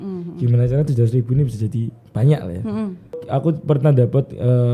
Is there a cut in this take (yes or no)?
yes